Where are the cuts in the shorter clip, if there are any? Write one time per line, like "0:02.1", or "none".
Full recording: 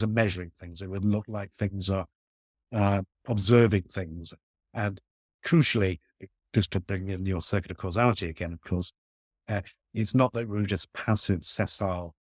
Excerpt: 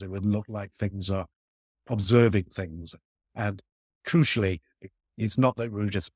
0:01.8
0:05.0